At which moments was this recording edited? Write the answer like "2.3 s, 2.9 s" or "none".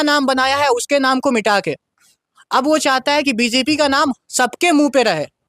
none